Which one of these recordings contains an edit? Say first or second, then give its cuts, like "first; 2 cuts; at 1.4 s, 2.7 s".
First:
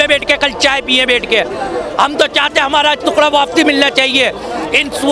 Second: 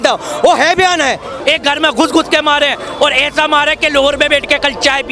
second; 1 cut; at 1.3 s